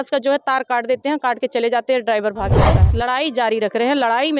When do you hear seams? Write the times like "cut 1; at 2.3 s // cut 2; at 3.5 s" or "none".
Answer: cut 1; at 2.8 s